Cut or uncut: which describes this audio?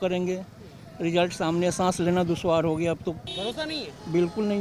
cut